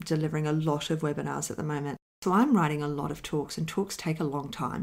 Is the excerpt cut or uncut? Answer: cut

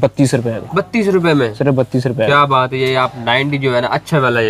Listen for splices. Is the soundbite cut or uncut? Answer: uncut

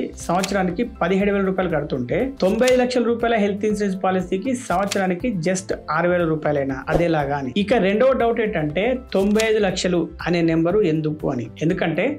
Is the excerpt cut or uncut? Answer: uncut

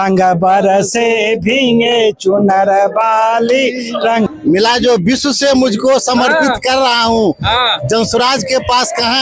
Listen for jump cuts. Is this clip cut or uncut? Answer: cut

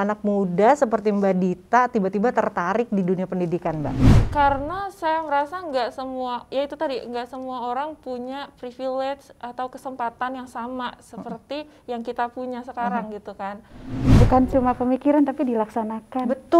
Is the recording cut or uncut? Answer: cut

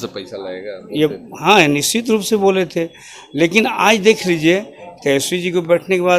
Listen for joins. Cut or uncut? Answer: uncut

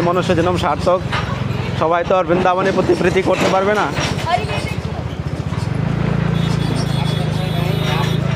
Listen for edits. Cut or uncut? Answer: uncut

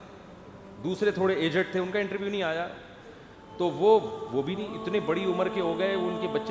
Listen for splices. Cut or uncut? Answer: uncut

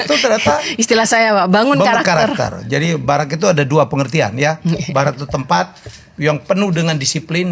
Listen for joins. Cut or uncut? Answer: uncut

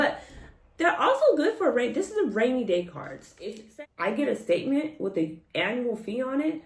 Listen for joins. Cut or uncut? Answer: cut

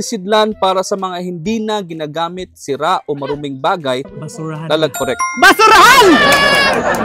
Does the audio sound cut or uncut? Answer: cut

